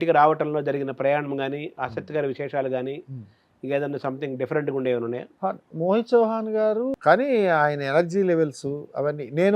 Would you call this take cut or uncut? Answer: cut